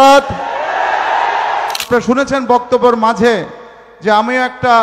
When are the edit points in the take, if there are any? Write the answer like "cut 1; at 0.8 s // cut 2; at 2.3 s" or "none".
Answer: cut 1; at 1.8 s